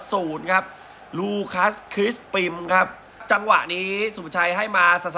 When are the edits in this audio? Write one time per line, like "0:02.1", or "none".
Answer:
0:03.2

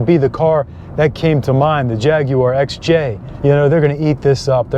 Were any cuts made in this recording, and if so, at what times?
0:03.3

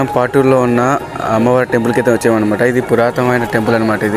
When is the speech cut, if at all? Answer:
none

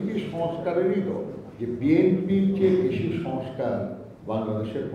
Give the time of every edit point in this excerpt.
0:01.4

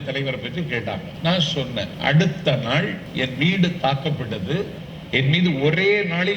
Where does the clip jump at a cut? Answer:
0:01.1
0:01.9
0:03.0
0:04.9

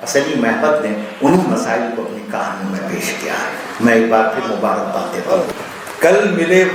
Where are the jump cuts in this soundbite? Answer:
0:05.5

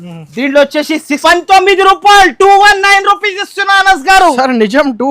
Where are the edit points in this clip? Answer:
0:01.2

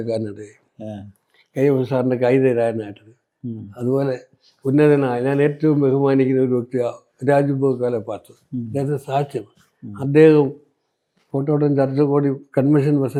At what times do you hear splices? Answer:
none

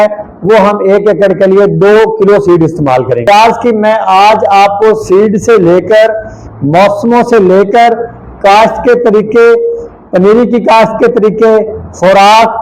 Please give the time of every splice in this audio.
0:03.2

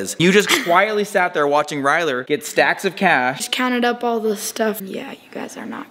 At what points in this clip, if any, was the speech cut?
0:03.4
0:04.8

